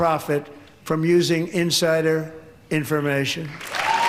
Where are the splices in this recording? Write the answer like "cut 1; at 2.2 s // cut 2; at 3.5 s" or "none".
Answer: none

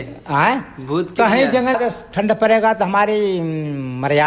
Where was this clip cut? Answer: cut 1; at 1.7 s

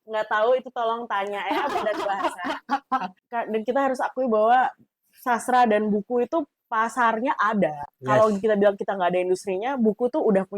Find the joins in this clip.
cut 1; at 3.2 s

